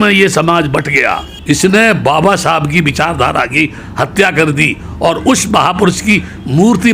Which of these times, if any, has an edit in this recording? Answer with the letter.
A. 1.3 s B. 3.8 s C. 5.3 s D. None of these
A